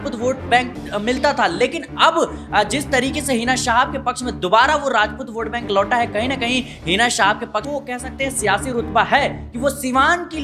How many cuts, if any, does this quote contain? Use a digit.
1